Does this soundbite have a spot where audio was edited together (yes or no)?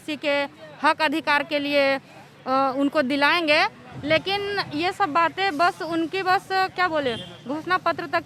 no